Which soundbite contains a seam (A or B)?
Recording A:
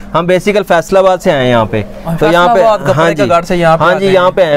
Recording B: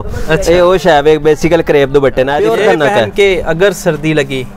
B